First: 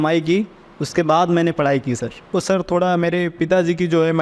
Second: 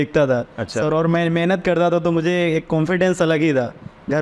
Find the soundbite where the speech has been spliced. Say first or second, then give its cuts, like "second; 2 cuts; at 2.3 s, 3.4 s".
first; 1 cut; at 2.1 s